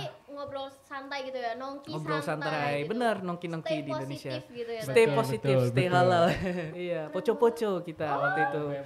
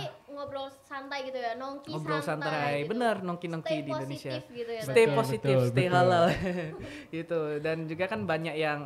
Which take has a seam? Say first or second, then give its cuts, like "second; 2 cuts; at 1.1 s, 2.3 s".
first; 1 cut; at 6.7 s